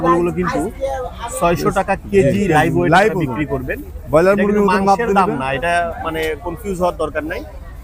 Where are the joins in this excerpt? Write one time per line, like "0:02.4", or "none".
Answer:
none